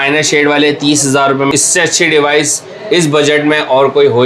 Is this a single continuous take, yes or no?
no